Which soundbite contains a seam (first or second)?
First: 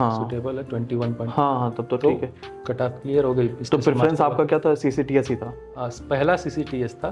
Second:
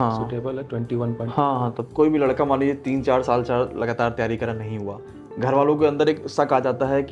second